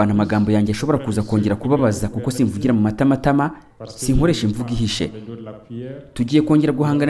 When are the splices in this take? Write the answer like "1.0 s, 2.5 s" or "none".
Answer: none